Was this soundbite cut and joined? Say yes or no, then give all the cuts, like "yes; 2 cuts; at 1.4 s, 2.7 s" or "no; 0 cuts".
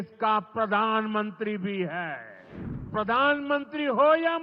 yes; 1 cut; at 2.9 s